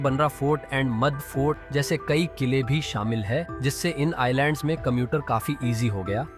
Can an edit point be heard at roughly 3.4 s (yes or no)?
no